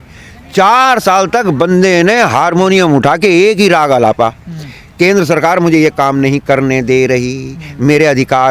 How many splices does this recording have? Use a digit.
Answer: 0